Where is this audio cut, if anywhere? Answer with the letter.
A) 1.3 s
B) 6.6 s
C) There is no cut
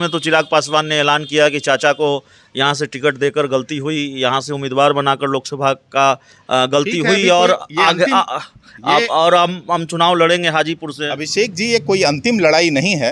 C